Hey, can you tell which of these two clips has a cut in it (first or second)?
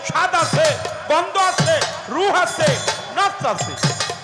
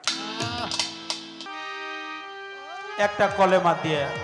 second